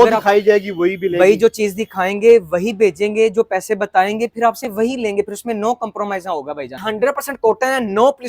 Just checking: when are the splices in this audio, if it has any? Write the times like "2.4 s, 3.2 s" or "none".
6.8 s